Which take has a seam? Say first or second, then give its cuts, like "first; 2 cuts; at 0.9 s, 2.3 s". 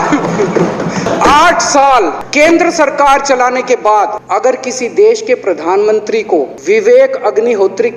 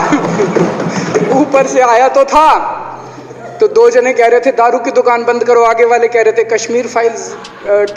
first; 4 cuts; at 1.0 s, 2.2 s, 4.2 s, 6.6 s